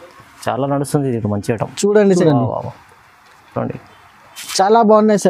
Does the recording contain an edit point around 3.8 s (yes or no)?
no